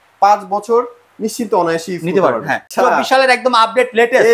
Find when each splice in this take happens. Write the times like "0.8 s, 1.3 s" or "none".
2.6 s